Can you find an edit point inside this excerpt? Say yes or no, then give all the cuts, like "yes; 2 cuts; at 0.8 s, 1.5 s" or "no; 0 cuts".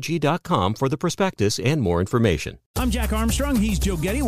yes; 1 cut; at 2.6 s